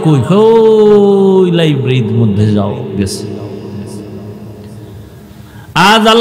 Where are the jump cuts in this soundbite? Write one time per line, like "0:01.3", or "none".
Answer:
none